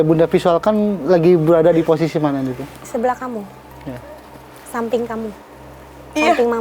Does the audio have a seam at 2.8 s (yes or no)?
no